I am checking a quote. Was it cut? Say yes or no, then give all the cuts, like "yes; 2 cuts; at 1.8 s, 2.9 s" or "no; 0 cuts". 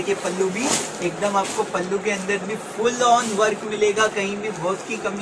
no; 0 cuts